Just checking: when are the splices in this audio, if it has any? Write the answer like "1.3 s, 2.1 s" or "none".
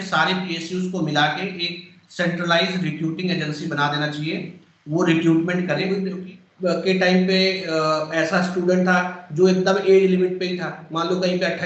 6.0 s